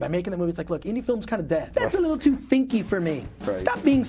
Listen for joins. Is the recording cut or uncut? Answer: cut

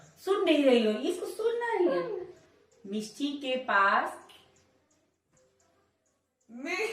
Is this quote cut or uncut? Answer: uncut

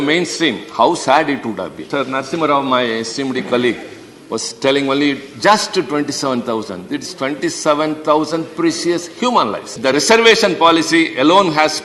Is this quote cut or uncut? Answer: cut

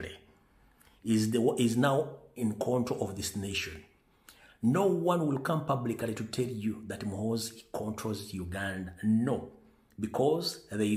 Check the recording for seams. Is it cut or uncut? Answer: uncut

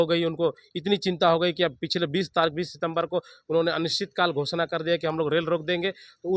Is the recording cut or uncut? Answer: uncut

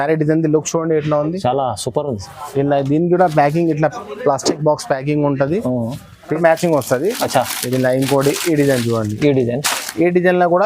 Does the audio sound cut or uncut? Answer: cut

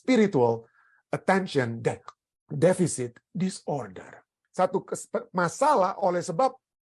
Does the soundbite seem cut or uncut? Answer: cut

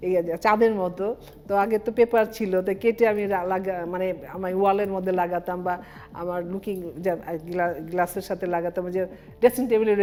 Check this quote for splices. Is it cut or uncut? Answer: uncut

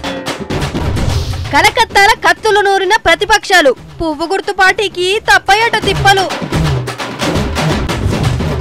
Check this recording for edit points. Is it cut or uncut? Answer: cut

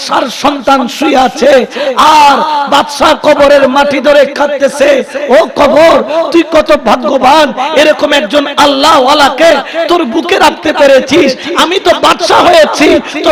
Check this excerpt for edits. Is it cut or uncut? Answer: uncut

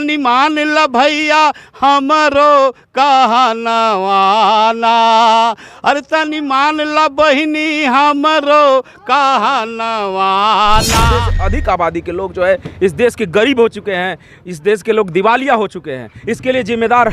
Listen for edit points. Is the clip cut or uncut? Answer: cut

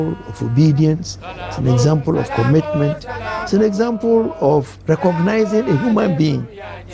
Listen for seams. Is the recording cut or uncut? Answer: uncut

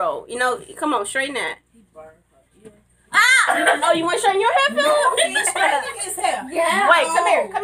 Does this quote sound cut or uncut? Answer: cut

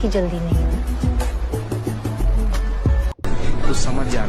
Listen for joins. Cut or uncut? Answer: cut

